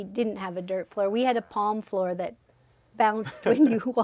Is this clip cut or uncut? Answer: uncut